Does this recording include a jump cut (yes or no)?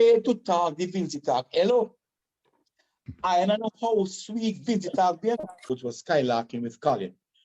yes